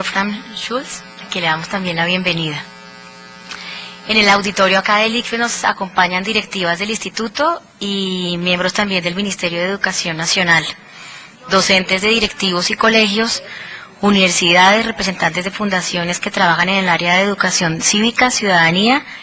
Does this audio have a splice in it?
no; 0 cuts

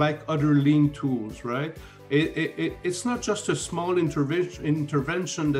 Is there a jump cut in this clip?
no; 0 cuts

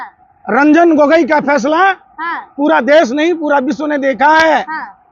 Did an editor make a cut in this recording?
no; 0 cuts

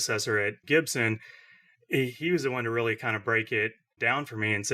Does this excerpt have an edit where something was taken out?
no; 0 cuts

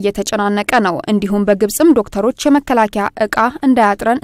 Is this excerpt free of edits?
yes; 0 cuts

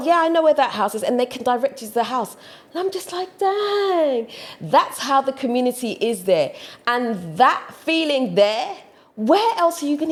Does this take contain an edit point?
no; 0 cuts

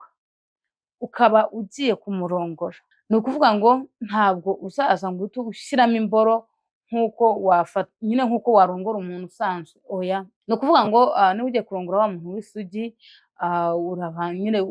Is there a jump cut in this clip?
yes; 2 cuts; at 2.9 s, 10.3 s

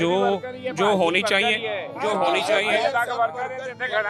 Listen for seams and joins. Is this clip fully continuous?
yes; 0 cuts

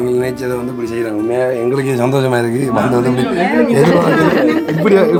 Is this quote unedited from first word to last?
yes; 0 cuts

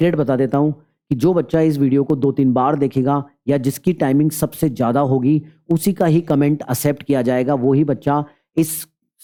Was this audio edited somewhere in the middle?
no; 0 cuts

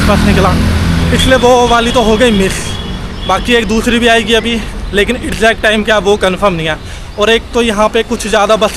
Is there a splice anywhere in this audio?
no; 0 cuts

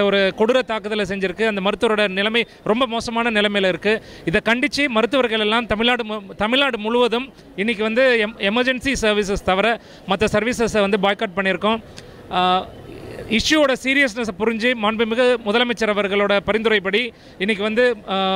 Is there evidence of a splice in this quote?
no; 0 cuts

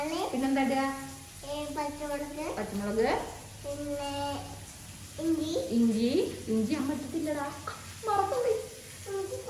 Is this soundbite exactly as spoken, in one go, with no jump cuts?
yes; 0 cuts

